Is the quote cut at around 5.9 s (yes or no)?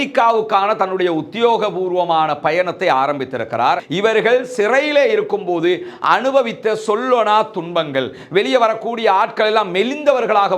no